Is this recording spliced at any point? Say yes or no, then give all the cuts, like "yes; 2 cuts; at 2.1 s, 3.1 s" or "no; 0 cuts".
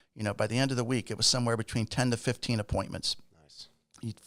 no; 0 cuts